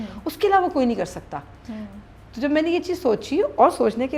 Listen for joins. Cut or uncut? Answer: uncut